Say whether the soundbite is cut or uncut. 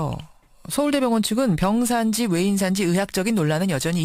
uncut